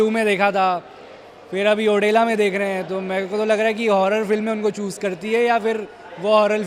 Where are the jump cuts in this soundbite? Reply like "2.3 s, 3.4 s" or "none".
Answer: none